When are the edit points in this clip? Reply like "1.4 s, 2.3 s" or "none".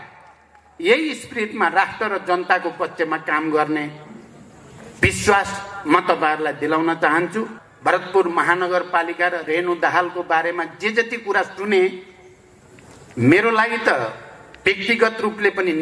7.6 s